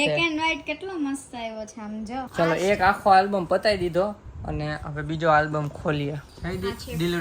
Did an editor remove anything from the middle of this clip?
yes; 2 cuts; at 2.2 s, 6.3 s

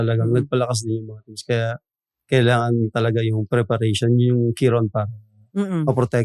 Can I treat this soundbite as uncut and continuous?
yes; 0 cuts

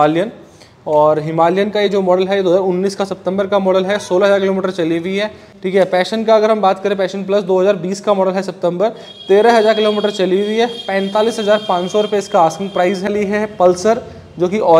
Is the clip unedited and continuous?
no; 2 cuts; at 5.5 s, 13.1 s

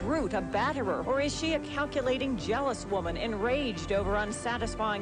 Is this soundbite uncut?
no; 1 cut; at 1.0 s

